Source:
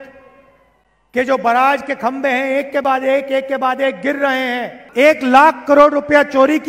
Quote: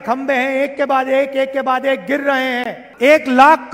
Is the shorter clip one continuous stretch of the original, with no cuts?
yes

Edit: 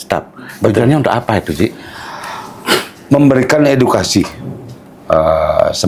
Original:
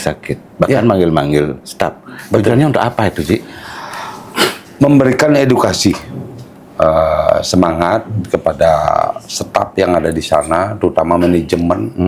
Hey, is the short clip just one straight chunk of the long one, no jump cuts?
yes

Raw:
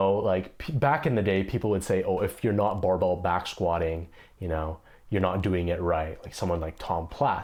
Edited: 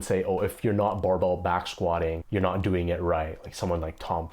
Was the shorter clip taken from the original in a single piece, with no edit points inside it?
no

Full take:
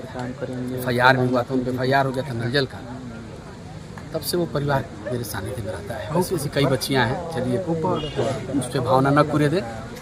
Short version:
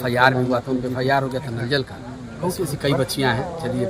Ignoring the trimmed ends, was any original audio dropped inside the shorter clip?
yes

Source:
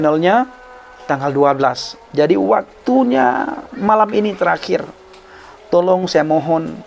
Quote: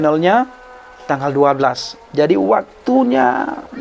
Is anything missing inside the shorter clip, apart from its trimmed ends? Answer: no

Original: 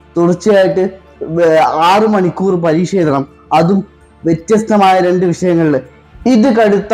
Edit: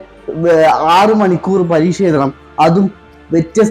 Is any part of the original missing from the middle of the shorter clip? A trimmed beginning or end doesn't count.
no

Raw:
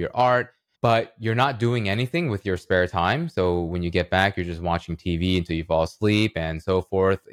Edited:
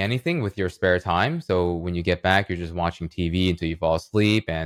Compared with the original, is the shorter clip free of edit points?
yes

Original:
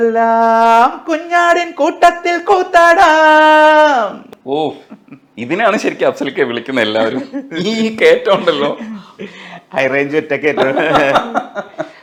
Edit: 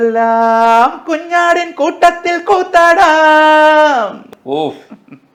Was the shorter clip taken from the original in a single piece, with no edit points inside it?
yes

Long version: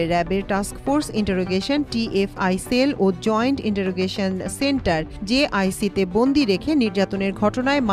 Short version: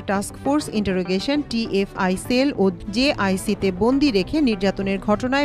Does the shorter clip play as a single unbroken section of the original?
no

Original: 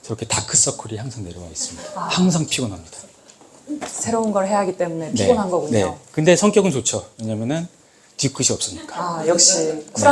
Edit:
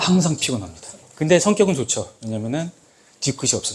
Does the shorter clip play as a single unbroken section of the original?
no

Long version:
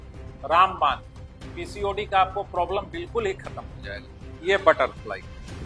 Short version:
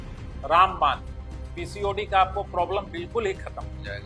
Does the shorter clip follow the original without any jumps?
yes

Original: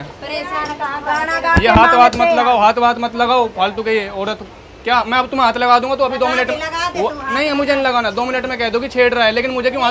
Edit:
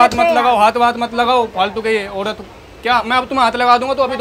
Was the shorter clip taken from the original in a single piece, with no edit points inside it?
yes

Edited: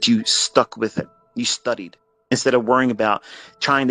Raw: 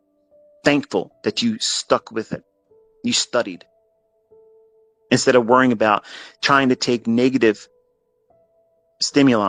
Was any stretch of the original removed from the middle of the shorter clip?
yes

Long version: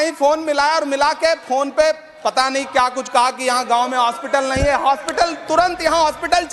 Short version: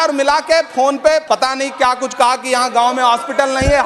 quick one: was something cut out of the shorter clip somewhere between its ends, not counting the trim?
yes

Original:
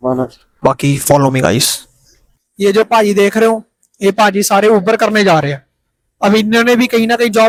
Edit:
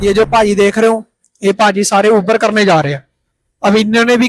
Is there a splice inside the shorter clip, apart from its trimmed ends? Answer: no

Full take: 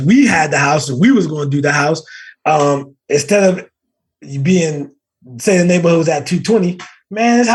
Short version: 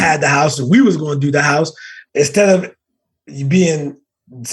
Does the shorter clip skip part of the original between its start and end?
yes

